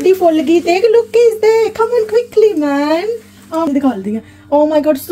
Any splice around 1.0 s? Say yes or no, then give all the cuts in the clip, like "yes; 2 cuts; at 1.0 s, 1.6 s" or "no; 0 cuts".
no; 1 cut; at 3.7 s